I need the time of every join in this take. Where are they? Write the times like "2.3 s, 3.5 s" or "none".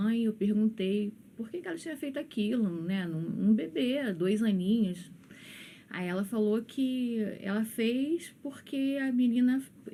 none